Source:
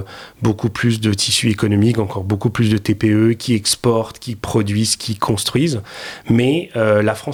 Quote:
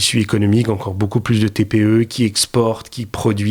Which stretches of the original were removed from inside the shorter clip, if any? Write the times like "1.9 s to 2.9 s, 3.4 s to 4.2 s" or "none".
none